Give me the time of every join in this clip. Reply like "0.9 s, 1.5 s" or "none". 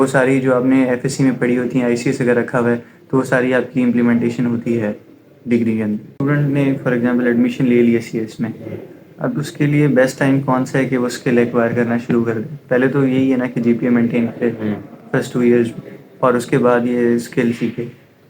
6.1 s

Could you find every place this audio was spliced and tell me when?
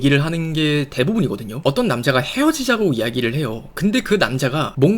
1.6 s

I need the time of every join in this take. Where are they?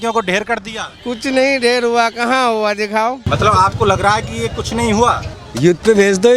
3.2 s, 5.3 s

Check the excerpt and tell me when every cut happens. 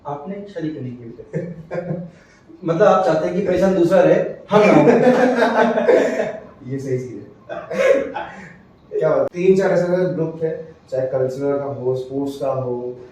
9.3 s

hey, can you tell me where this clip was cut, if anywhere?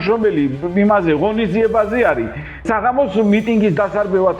2.7 s

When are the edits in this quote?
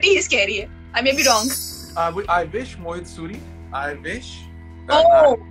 1.8 s

